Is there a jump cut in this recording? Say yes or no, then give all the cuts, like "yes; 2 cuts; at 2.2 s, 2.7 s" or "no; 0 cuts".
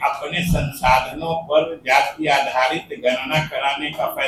no; 0 cuts